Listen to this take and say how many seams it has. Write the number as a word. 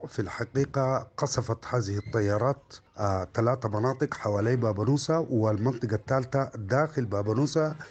zero